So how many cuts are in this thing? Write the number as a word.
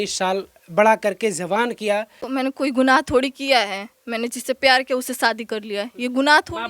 one